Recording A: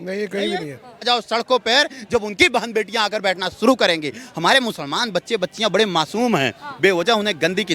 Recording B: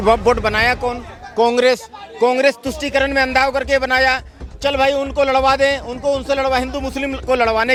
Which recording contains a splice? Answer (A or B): A